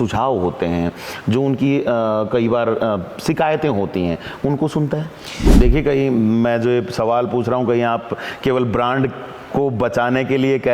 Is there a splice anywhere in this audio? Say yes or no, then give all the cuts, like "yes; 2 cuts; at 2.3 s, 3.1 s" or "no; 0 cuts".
yes; 1 cut; at 5.5 s